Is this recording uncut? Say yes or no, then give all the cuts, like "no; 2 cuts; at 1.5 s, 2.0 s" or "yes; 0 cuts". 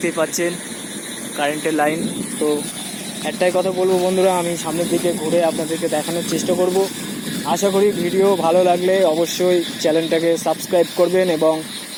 yes; 0 cuts